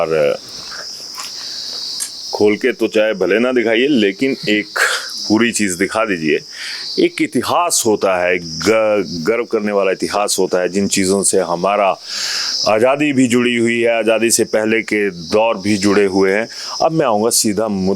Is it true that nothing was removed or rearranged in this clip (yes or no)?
yes